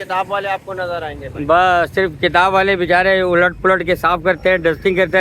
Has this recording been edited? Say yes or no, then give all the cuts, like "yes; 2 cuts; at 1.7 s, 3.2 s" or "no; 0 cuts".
no; 0 cuts